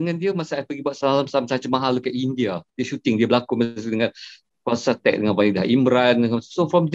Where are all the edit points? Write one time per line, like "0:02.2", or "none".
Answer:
0:02.7

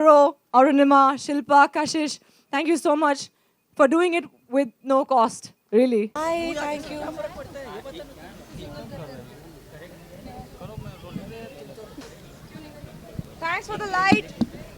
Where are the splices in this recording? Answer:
0:06.1

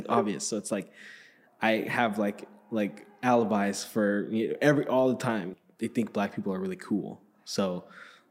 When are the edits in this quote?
0:05.5

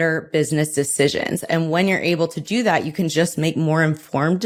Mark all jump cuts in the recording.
none

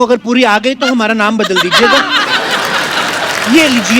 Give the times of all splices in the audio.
none

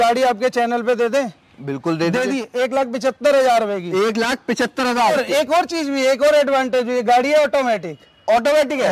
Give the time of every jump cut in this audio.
0:05.0

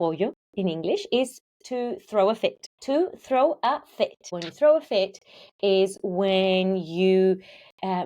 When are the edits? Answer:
0:02.7
0:04.4

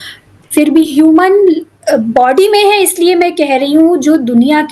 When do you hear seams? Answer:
none

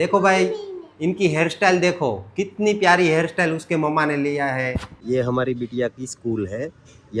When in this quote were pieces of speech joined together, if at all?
0:04.9

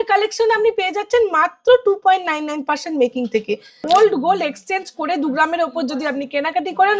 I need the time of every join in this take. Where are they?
0:03.7

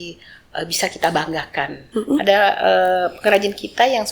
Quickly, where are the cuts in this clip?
0:01.8

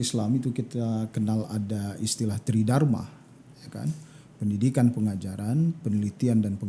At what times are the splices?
none

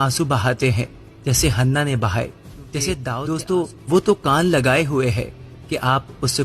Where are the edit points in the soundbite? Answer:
0:03.1

